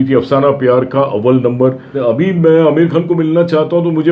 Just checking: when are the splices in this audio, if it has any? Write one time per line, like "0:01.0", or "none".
0:01.9